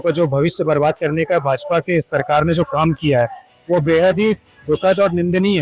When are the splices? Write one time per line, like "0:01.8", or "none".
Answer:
none